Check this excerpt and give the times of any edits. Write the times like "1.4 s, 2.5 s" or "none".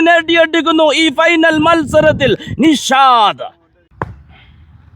3.9 s